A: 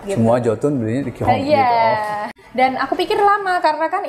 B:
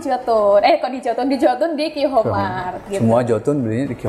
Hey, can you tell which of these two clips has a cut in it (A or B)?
A